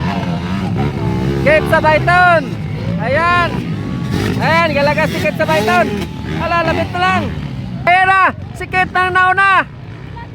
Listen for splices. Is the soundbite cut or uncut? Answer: cut